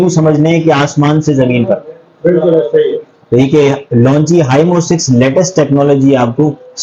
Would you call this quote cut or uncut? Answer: uncut